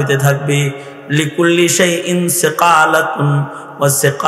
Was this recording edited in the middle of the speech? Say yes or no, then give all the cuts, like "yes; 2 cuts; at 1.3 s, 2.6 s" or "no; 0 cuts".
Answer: no; 0 cuts